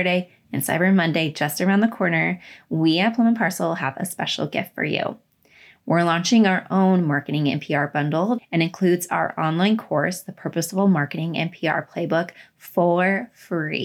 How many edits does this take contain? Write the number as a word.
one